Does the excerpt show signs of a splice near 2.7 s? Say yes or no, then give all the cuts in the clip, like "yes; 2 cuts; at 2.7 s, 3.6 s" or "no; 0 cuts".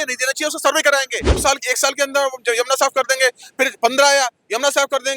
no; 1 cut; at 1.4 s